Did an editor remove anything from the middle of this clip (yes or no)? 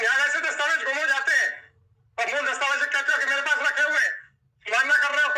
no